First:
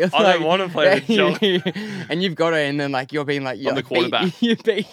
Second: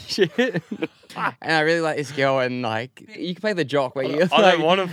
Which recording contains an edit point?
second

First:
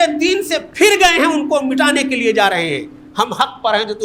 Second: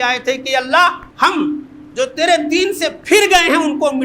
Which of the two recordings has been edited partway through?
second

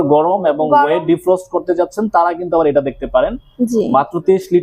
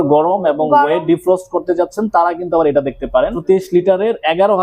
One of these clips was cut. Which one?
second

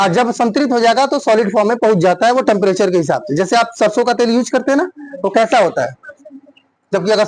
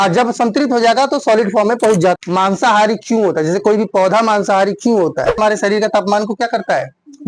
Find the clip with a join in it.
second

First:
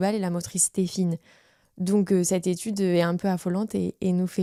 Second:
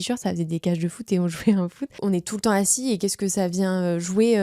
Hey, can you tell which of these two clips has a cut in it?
second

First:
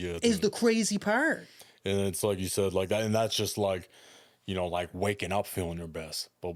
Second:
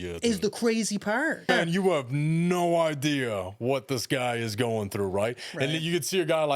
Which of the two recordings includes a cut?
second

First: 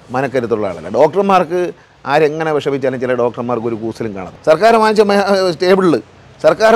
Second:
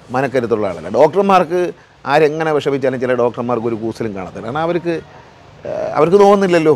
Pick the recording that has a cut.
first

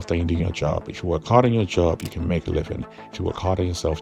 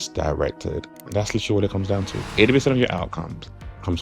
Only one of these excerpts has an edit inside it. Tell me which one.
second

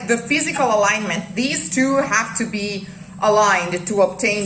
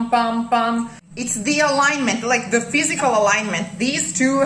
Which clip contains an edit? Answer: second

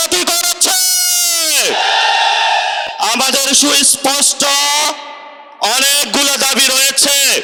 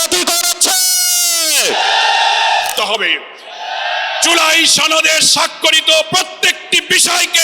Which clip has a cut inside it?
second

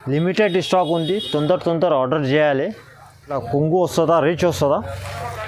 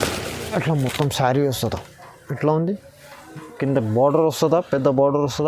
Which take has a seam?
first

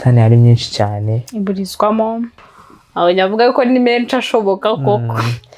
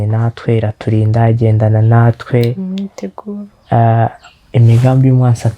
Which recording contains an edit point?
first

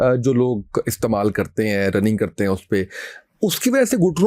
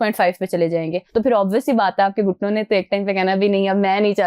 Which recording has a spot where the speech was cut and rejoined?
second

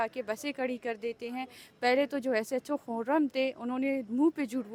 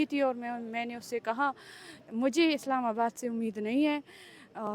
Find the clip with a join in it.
second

